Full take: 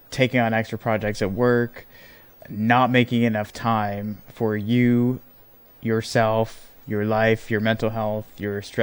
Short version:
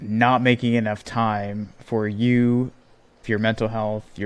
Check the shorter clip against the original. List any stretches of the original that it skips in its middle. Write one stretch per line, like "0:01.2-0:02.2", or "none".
0:05.7-0:07.4